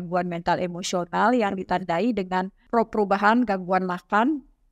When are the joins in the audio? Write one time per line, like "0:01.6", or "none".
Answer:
0:02.6